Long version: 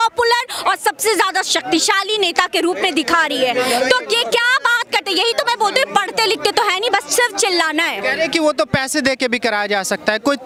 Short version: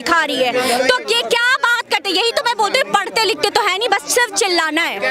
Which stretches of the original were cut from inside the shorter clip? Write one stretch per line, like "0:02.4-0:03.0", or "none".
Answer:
none